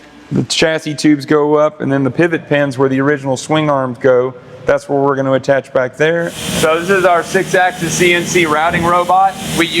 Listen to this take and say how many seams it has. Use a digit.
1